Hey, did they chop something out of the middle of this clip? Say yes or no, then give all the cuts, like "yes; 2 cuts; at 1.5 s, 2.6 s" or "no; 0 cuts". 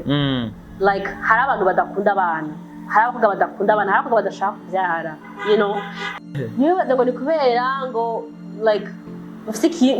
yes; 1 cut; at 6.3 s